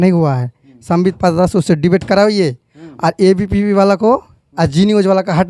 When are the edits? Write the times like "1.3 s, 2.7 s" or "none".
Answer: none